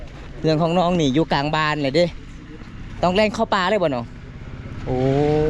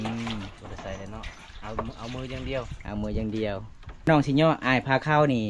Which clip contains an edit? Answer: second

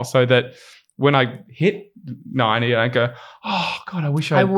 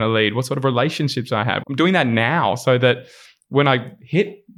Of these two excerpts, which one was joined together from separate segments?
second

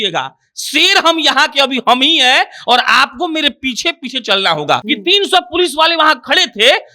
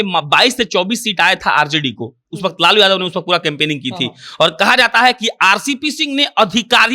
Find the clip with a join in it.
first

